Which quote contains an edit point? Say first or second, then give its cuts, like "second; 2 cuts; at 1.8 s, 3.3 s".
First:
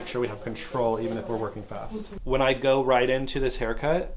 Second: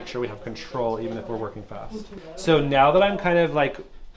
first; 1 cut; at 2.1 s